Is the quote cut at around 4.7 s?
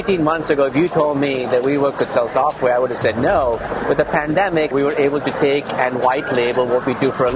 yes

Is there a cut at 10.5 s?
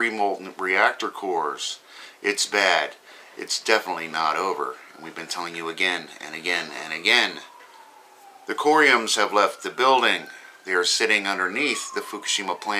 yes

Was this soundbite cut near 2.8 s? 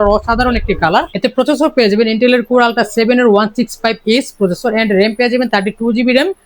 no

